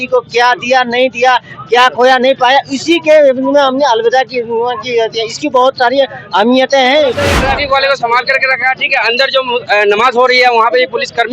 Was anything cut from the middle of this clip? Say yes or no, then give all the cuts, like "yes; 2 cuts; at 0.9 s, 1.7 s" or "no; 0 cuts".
yes; 1 cut; at 7.2 s